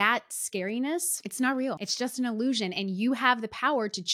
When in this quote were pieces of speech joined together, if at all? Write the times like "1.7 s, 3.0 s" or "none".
1.2 s, 1.8 s

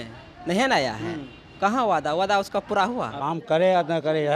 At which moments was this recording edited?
3.1 s

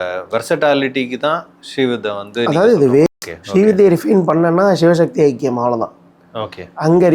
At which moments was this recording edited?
3.1 s

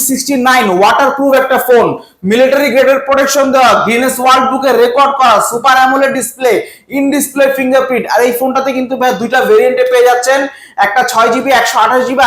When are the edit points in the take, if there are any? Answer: none

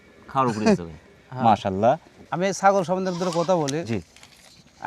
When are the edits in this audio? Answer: 2.2 s

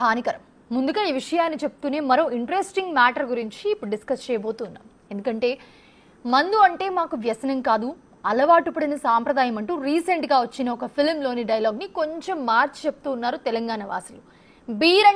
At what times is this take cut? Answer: none

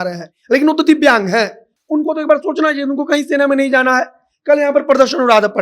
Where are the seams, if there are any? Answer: none

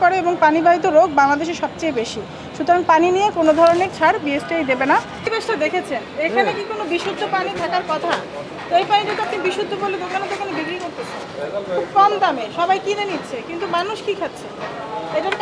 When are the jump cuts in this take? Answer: 5.2 s

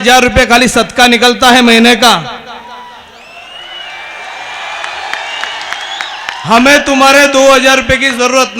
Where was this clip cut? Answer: none

